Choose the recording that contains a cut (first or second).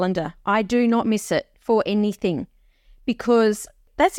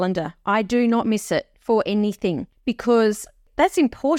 second